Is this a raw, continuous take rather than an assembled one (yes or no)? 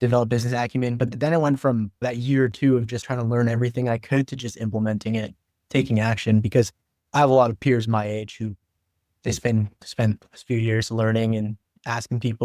no